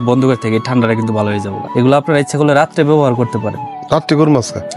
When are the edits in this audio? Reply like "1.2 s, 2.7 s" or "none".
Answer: 1.6 s